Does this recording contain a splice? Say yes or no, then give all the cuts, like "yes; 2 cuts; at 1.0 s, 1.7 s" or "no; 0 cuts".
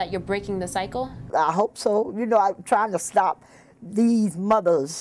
yes; 1 cut; at 1.2 s